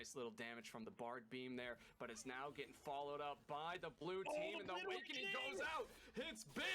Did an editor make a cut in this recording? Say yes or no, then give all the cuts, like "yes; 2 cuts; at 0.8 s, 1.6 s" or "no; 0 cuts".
no; 0 cuts